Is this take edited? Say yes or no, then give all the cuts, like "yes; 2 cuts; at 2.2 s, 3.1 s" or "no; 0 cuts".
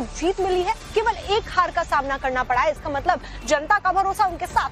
no; 0 cuts